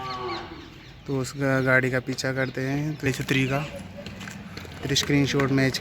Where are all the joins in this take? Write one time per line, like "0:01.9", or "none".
0:03.1